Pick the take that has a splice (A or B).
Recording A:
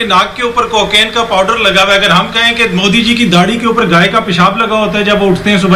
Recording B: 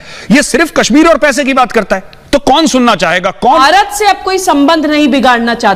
B